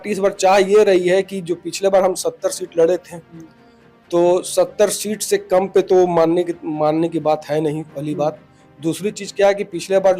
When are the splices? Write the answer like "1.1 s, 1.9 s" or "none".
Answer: none